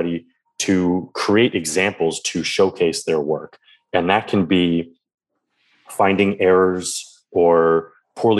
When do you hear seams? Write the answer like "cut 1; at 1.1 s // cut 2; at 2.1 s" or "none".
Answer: none